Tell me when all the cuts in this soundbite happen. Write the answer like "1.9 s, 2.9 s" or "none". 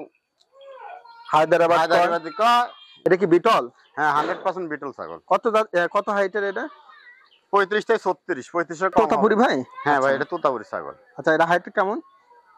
2.8 s, 9.0 s